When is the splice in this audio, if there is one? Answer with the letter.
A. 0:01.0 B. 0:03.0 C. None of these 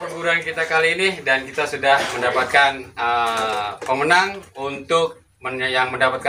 C